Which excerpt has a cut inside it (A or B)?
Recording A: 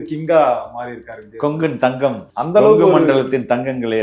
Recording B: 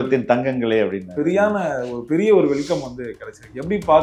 A